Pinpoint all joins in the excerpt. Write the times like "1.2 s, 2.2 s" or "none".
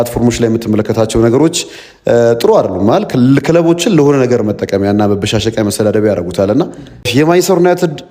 7.1 s